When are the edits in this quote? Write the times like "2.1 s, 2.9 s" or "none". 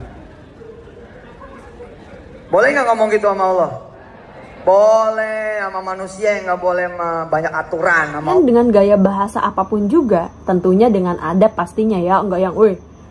8.3 s